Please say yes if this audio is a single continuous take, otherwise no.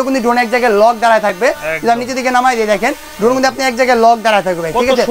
yes